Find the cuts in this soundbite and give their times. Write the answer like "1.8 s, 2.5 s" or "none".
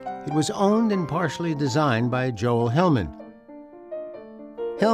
1.6 s